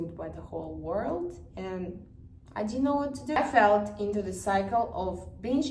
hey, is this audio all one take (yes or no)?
yes